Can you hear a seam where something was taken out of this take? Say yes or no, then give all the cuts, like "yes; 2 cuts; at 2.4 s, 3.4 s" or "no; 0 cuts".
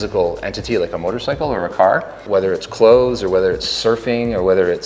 no; 0 cuts